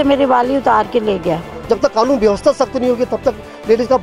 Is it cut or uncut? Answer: cut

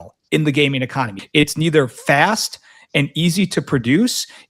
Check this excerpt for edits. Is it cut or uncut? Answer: cut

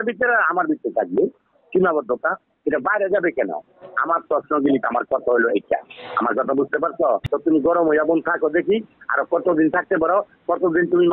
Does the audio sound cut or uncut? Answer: cut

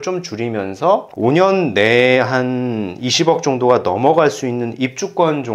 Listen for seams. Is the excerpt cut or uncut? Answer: uncut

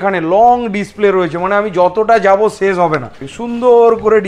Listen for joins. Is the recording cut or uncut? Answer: cut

